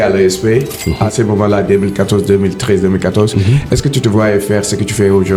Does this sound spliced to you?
no; 0 cuts

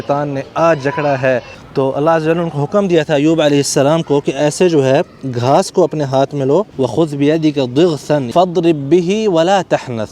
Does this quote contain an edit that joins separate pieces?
yes; 3 cuts; at 1.6 s, 6.7 s, 8.3 s

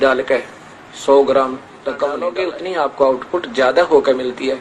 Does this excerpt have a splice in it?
yes; 1 cut; at 2.2 s

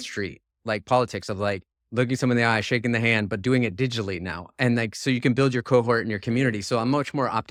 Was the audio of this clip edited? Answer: no; 0 cuts

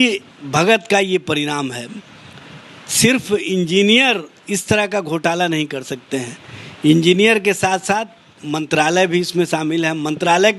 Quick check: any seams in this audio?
no; 0 cuts

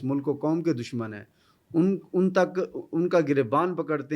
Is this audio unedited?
yes; 0 cuts

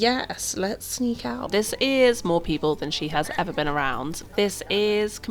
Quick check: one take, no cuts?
no; 2 cuts; at 1.5 s, 4.2 s

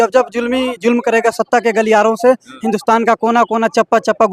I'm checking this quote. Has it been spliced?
no; 0 cuts

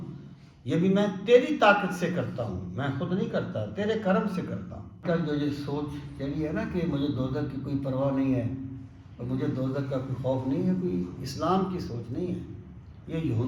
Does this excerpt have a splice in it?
yes; 1 cut; at 5.0 s

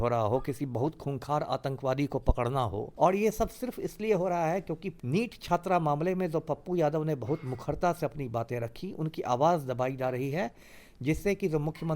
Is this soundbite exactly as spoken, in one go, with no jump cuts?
no; 2 cuts; at 2.9 s, 4.9 s

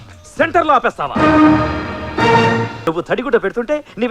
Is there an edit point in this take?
yes; 1 cut; at 2.8 s

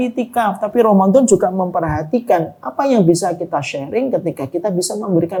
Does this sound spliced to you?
no; 0 cuts

